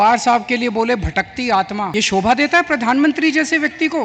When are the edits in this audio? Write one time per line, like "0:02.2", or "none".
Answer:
0:01.9